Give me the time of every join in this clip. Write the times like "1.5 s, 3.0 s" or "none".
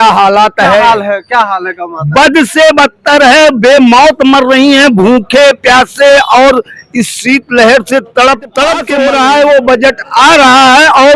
8.8 s